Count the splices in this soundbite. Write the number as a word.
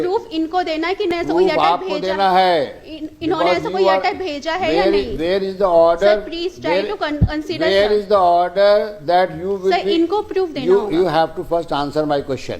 one